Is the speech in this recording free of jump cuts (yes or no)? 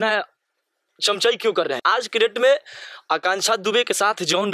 no